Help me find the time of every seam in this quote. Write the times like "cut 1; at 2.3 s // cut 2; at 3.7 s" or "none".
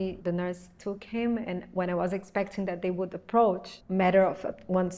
cut 1; at 3.7 s